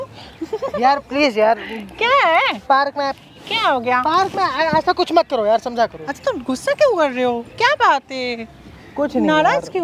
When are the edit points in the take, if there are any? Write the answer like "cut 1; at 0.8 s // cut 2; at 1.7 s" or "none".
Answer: none